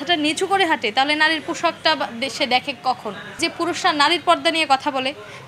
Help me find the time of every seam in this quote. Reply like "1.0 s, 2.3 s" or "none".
3.4 s